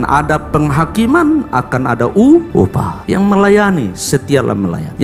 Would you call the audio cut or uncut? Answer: uncut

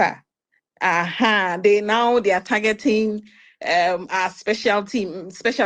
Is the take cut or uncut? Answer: uncut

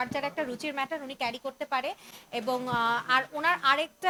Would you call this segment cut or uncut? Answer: uncut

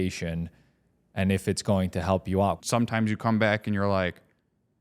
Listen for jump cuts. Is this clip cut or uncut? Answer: cut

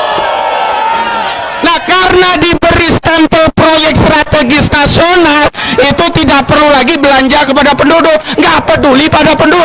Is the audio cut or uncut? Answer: uncut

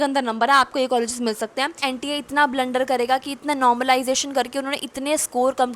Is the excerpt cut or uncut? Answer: cut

